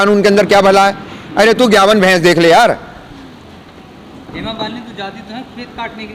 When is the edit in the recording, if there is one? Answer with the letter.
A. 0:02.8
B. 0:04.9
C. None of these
C